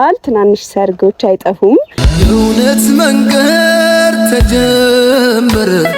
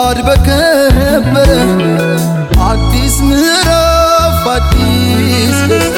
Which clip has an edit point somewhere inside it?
first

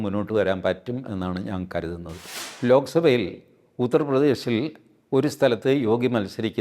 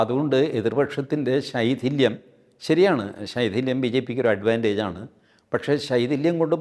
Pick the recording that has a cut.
first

